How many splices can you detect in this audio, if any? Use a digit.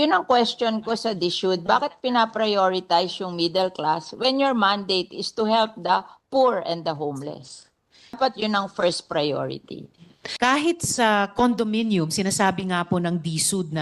2